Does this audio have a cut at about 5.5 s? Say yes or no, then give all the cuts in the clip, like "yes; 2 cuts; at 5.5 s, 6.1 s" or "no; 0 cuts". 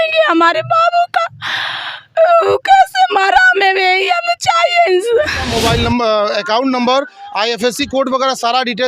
yes; 1 cut; at 5.5 s